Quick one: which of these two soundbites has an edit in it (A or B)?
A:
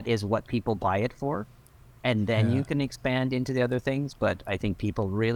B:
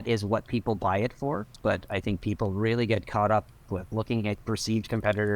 B